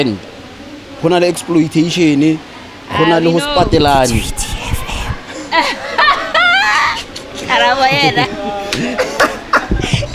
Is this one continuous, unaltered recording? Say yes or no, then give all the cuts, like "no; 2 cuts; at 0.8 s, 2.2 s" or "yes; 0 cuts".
yes; 0 cuts